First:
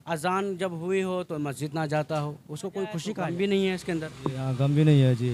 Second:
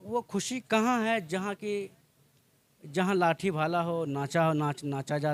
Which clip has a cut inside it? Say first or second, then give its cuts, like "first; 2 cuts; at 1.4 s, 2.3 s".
first; 1 cut; at 3.1 s